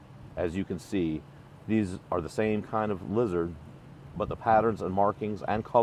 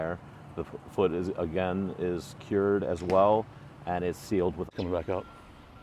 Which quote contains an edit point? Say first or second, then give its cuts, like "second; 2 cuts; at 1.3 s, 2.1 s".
second; 1 cut; at 4.7 s